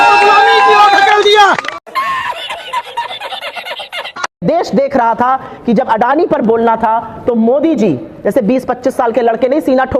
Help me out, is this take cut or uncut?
uncut